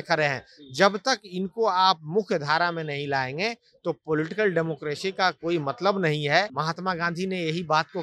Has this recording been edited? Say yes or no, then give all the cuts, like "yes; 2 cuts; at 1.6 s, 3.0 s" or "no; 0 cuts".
yes; 1 cut; at 6.5 s